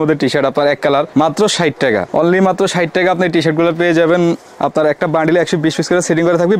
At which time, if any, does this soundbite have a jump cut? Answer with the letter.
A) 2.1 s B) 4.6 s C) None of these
C